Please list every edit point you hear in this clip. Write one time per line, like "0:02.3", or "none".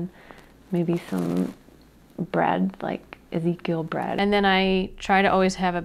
0:04.2

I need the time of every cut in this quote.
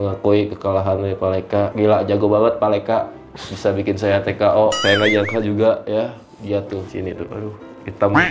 0:04.8
0:07.1

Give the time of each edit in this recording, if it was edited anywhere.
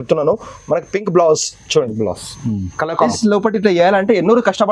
0:03.1

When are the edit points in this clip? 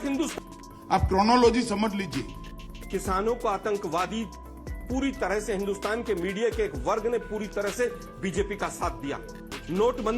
0:02.4

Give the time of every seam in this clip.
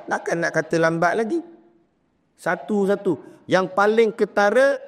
none

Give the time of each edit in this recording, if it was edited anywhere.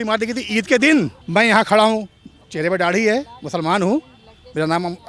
0:01.2

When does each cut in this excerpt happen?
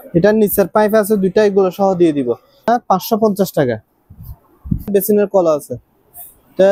0:02.7
0:04.9

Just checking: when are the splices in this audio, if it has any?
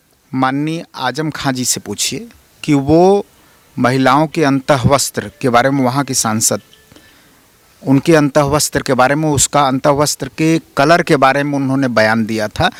none

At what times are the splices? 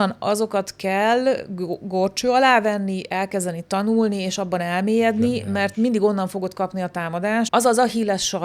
0:07.5

